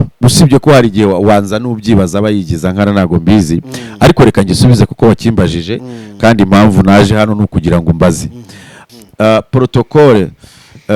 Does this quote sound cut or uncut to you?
cut